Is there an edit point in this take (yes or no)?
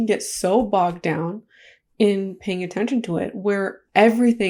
no